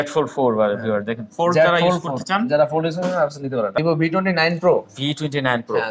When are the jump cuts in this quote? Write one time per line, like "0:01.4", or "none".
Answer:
0:03.7